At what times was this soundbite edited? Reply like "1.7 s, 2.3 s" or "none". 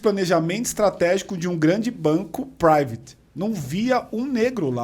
none